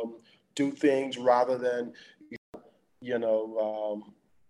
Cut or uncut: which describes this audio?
cut